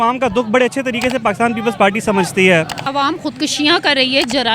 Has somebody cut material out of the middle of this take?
yes; 1 cut; at 2.8 s

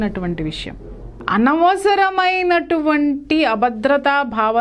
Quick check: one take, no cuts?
no; 1 cut; at 1.1 s

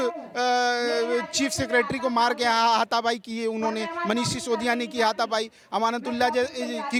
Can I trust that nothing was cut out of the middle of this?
yes; 0 cuts

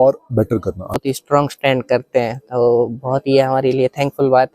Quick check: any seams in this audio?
yes; 1 cut; at 0.9 s

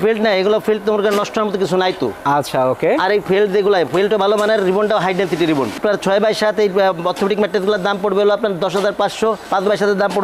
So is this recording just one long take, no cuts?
yes; 0 cuts

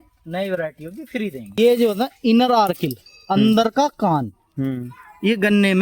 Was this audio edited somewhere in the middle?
yes; 1 cut; at 1.6 s

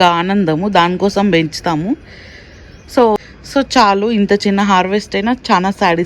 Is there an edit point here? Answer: yes; 1 cut; at 3.2 s

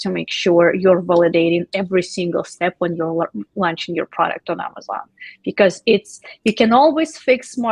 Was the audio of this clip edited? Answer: no; 0 cuts

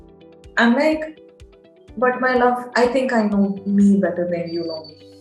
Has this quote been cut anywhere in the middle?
no; 0 cuts

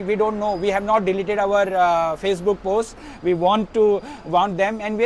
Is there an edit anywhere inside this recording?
no; 0 cuts

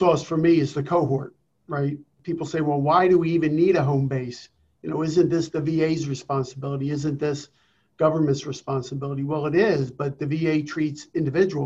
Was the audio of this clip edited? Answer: yes; 1 cut; at 2.0 s

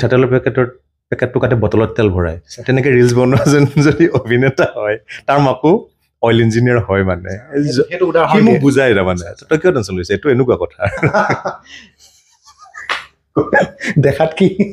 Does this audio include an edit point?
yes; 1 cut; at 12.0 s

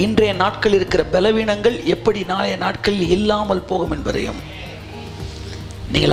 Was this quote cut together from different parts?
no; 0 cuts

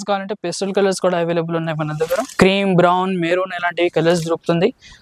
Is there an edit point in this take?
yes; 1 cut; at 2.3 s

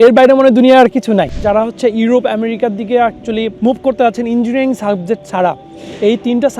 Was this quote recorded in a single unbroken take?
no; 2 cuts; at 1.4 s, 3.5 s

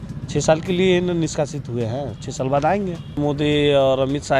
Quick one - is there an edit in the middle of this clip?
yes; 1 cut; at 3.2 s

